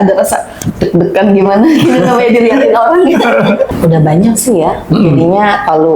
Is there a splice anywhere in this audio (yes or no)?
yes